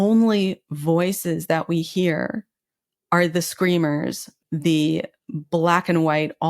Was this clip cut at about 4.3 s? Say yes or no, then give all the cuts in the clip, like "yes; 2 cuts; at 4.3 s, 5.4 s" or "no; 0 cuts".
yes; 1 cut; at 4.3 s